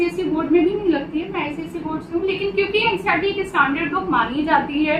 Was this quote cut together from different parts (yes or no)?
no